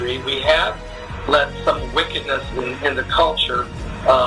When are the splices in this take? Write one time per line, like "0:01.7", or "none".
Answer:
none